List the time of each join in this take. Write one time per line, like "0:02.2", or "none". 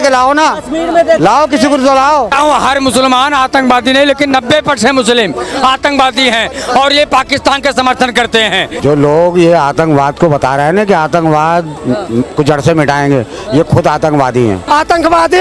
0:02.3
0:08.7
0:14.6